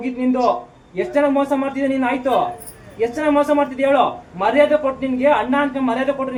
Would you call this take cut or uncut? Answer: uncut